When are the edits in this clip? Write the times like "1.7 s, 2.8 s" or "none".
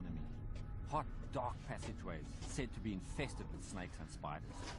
1.4 s